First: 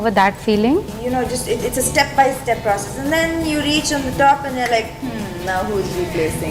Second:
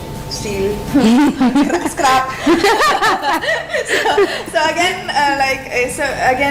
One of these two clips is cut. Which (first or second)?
first